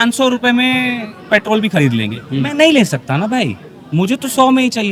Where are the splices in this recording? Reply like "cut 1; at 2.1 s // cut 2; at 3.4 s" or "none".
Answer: none